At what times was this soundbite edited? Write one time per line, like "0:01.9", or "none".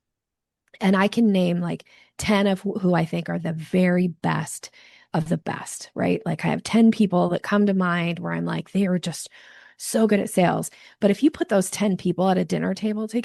none